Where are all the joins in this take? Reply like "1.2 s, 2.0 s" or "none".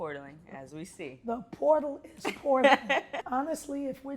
3.3 s